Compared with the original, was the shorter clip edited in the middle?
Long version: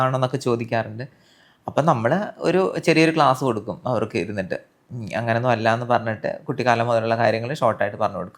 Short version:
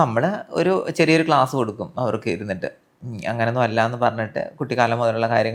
no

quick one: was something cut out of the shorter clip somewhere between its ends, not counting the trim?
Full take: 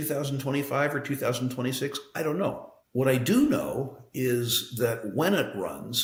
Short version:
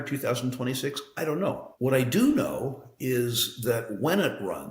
yes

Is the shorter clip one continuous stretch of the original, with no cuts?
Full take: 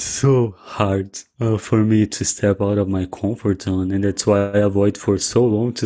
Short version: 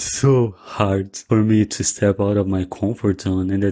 no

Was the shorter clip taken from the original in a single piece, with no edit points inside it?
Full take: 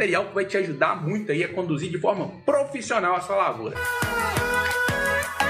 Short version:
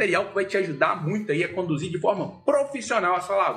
yes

